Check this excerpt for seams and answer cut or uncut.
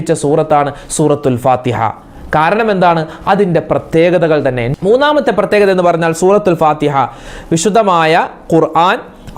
uncut